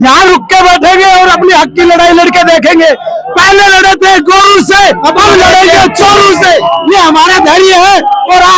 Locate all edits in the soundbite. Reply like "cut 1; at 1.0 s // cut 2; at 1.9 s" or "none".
none